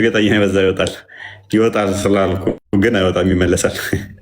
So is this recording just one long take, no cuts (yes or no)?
no